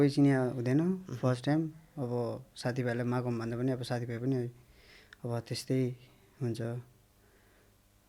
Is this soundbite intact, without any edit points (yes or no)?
yes